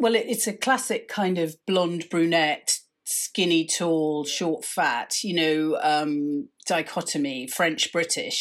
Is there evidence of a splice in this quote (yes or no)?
no